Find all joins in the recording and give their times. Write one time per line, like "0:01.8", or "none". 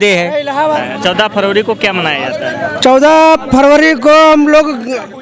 none

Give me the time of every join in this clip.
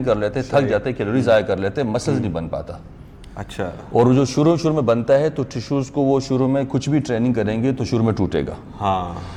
none

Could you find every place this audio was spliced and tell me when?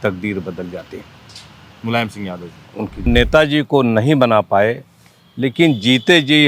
0:03.1

